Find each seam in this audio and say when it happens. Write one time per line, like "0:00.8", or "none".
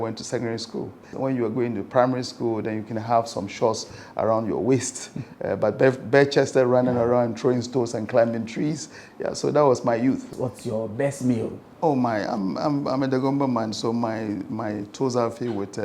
0:01.1
0:10.3